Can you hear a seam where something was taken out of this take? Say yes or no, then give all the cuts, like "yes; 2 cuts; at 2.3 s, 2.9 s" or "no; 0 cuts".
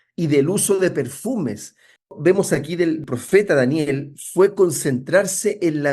yes; 2 cuts; at 2.1 s, 3.1 s